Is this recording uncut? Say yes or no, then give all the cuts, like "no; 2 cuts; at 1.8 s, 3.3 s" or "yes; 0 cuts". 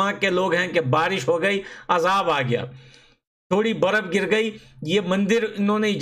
yes; 0 cuts